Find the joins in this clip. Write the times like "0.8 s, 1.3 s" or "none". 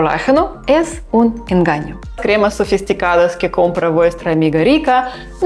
2.2 s